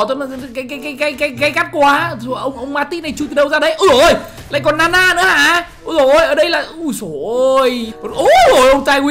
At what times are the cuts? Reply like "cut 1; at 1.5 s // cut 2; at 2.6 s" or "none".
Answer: cut 1; at 7.9 s